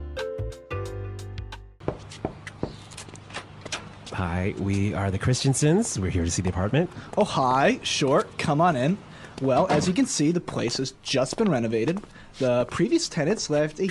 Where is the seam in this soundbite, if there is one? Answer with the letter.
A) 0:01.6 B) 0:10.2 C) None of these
A